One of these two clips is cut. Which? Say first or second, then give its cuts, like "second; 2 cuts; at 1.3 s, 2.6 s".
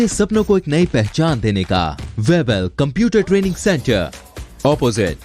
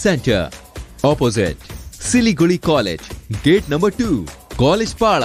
first; 1 cut; at 2.0 s